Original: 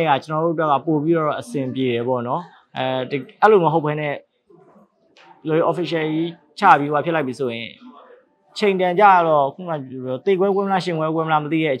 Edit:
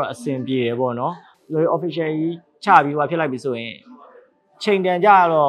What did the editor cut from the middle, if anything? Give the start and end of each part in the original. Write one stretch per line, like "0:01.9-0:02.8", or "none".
0:02.6-0:05.3

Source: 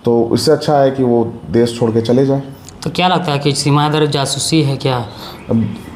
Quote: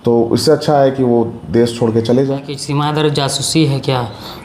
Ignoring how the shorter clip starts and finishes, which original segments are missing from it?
0:02.6-0:03.5

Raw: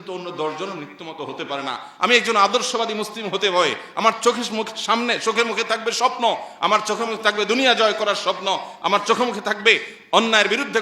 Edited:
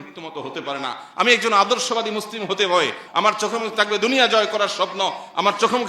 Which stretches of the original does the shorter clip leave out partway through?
0:03.8-0:06.5

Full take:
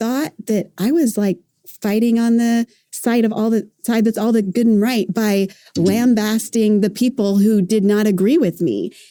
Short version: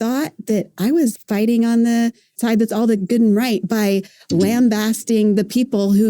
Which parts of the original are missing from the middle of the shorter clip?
0:01.1-0:01.7
0:02.8-0:03.7

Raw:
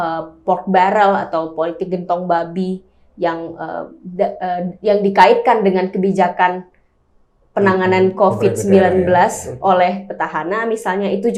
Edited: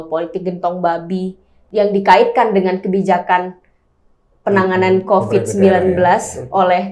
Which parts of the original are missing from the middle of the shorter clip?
0:03.1-0:04.7

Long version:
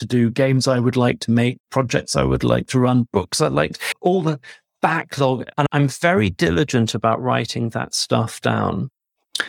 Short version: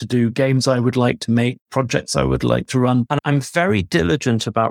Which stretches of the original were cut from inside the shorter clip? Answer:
0:03.1-0:05.5

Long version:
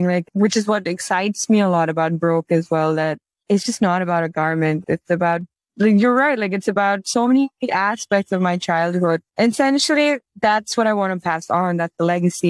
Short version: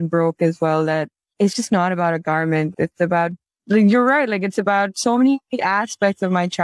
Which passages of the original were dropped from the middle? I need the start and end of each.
none

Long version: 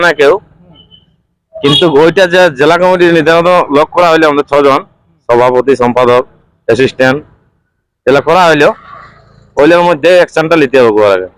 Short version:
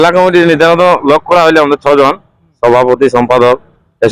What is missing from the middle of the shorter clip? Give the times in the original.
none

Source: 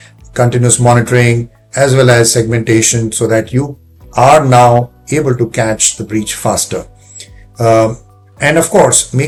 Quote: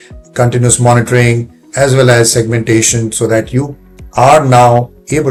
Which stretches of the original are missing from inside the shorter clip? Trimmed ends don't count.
none

